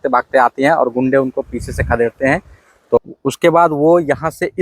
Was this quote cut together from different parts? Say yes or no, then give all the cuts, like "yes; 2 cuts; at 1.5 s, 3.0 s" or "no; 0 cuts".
yes; 1 cut; at 3.0 s